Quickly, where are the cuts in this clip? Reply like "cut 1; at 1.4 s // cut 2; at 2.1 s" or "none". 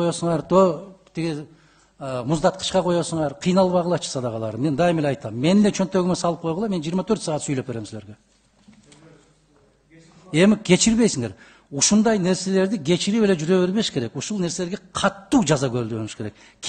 none